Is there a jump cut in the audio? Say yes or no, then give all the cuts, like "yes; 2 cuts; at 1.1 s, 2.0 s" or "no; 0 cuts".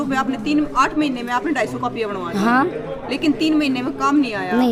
no; 0 cuts